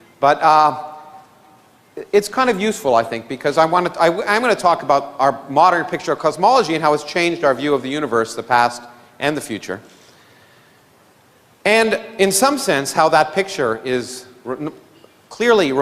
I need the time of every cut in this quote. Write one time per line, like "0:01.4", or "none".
0:09.4